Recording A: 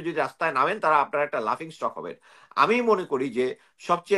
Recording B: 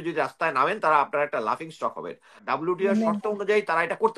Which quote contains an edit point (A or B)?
B